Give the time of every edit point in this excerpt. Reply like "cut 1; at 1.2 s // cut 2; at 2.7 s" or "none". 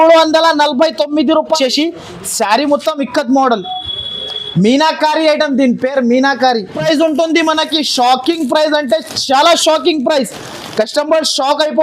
cut 1; at 1.6 s // cut 2; at 6.8 s